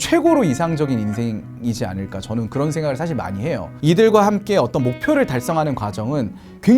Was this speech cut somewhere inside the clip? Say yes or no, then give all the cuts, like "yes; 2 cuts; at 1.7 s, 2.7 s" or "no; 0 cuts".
yes; 1 cut; at 3.7 s